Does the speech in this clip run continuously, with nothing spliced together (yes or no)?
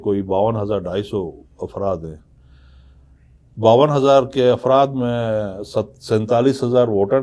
yes